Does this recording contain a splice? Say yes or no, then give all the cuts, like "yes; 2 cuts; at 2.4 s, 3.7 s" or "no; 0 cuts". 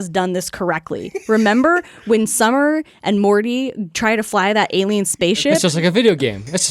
yes; 1 cut; at 5.7 s